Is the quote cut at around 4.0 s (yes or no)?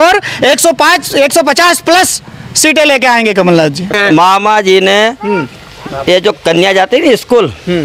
yes